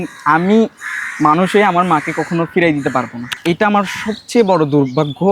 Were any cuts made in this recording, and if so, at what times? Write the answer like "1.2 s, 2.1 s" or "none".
3.3 s